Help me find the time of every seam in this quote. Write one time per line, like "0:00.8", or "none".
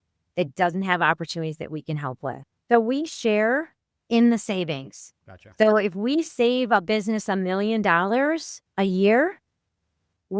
0:02.5